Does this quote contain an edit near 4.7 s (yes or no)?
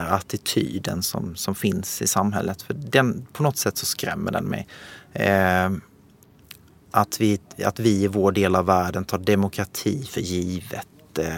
no